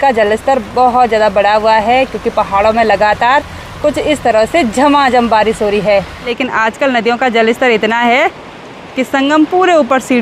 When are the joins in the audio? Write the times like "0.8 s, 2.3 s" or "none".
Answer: 6.3 s

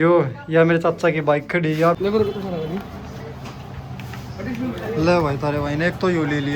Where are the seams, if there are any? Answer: 2.0 s

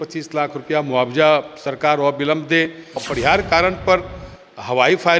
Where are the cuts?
3.0 s

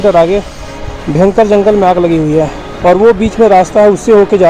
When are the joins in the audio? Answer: 2.6 s

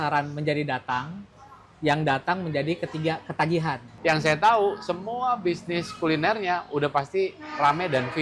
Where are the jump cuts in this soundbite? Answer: 3.9 s

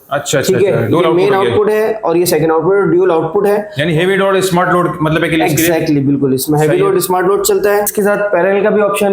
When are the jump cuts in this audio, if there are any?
7.9 s

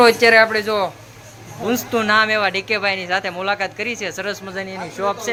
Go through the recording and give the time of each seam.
none

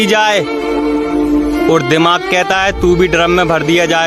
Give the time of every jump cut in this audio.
2.6 s

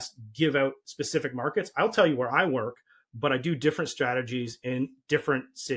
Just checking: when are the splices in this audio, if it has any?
none

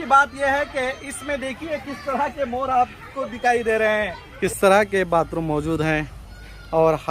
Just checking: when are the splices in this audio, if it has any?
4.2 s

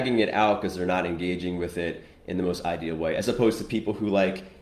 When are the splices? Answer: none

